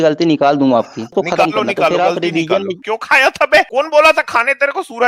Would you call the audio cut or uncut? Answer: cut